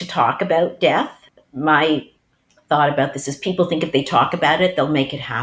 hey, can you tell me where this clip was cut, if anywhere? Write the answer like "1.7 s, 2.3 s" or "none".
1.2 s, 2.2 s